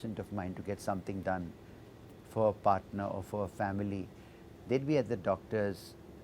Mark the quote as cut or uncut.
uncut